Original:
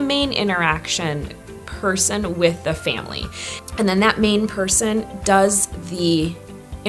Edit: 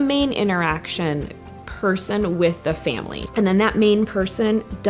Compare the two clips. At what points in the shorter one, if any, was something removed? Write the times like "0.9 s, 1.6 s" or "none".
3.1 s